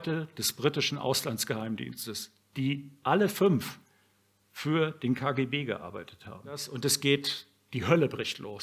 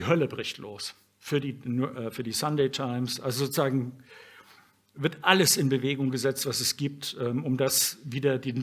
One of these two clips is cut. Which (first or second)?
first